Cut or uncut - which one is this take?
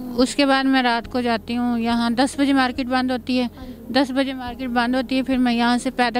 uncut